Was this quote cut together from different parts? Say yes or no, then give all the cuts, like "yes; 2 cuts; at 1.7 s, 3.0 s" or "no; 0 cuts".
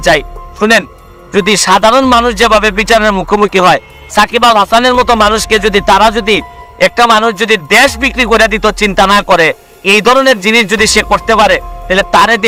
no; 0 cuts